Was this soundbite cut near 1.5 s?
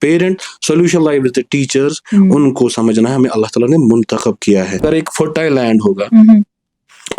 no; 1 cut; at 4.8 s

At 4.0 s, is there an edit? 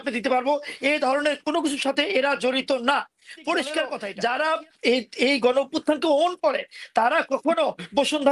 yes; 1 cut; at 4.0 s

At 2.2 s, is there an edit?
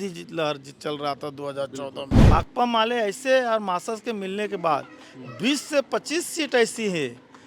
yes; 1 cut; at 2.2 s

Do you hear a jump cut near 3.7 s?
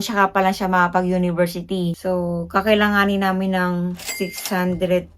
no; 1 cut; at 2.0 s

